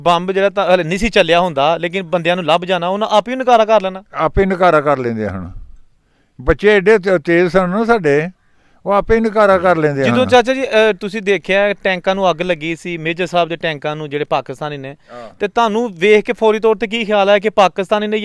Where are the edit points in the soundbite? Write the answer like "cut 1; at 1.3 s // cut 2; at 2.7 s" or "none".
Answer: cut 1; at 10.1 s